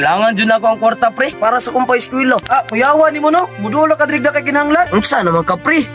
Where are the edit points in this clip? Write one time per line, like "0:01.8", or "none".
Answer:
0:01.3
0:02.4
0:04.9